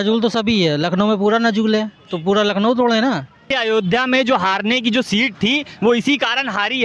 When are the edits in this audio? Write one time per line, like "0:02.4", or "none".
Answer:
0:03.5